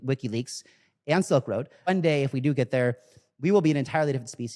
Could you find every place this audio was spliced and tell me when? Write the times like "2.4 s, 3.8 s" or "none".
1.9 s